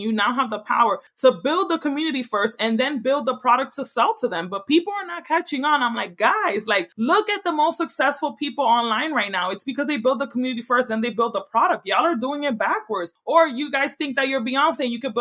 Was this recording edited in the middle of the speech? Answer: yes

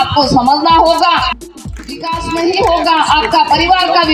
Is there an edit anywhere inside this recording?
yes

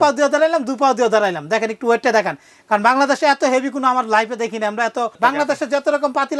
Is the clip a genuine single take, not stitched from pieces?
no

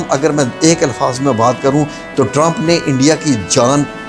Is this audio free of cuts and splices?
yes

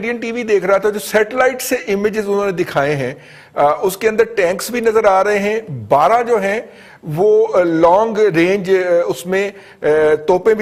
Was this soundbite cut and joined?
no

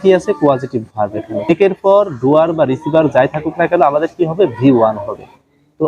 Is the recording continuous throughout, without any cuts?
no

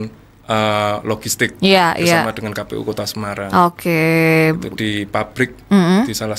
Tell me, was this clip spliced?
no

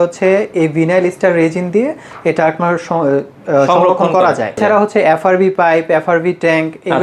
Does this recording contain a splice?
yes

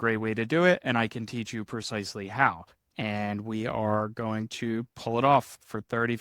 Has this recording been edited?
yes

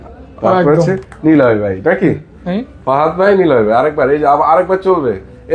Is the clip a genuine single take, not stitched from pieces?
yes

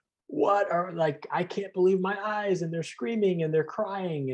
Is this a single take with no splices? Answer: yes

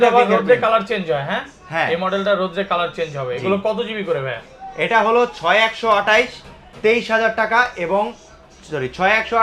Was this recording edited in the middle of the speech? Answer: no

